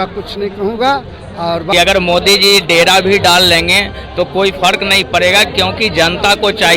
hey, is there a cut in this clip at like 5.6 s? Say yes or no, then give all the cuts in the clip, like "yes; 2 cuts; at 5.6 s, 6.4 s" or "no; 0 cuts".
no; 1 cut; at 1.7 s